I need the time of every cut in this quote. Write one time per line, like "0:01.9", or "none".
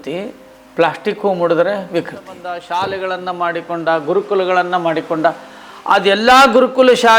0:02.4